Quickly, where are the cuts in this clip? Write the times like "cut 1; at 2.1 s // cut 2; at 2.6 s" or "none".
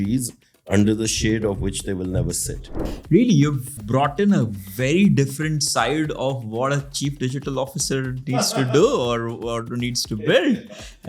cut 1; at 2.8 s // cut 2; at 3.8 s